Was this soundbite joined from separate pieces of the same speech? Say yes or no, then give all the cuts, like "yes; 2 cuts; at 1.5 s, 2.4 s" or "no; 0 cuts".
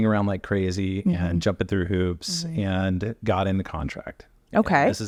no; 0 cuts